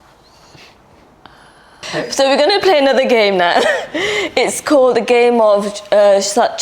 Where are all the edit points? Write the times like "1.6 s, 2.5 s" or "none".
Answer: 1.8 s